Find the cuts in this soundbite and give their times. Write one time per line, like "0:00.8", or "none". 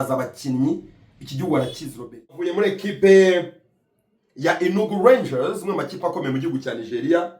0:02.5